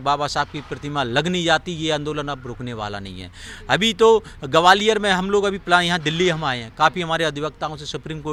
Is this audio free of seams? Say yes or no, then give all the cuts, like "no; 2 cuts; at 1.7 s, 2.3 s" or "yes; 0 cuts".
yes; 0 cuts